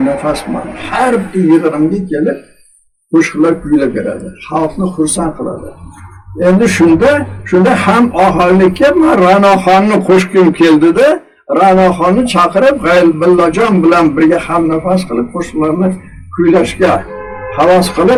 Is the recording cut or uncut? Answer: uncut